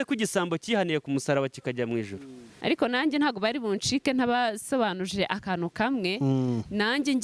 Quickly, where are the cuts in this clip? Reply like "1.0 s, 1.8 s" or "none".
2.5 s